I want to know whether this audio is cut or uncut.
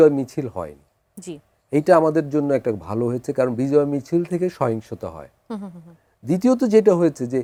uncut